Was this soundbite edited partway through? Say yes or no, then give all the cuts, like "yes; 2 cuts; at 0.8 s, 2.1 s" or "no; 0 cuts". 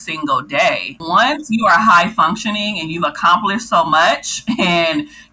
yes; 1 cut; at 1.0 s